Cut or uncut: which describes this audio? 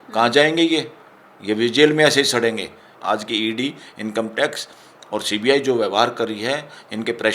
cut